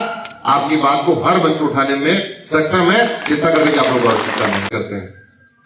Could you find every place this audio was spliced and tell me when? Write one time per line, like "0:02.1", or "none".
0:04.7